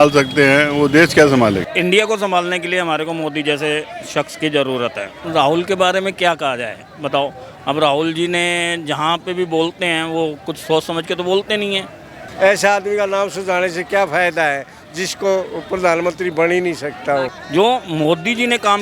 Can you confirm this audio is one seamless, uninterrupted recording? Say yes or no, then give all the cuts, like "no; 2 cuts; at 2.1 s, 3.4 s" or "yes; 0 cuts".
no; 4 cuts; at 1.7 s, 5.1 s, 12.2 s, 17.4 s